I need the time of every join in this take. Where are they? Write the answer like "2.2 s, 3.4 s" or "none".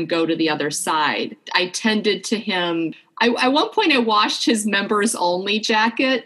1.4 s, 3.0 s